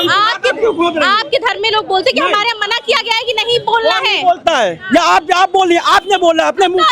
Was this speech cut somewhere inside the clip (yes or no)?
no